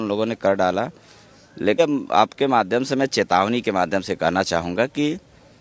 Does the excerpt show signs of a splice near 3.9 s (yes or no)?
no